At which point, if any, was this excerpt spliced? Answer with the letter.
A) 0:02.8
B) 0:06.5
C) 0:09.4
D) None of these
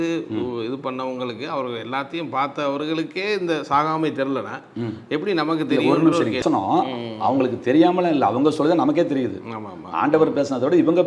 D